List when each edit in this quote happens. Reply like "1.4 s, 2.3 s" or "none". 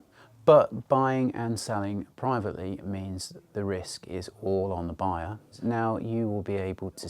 5.5 s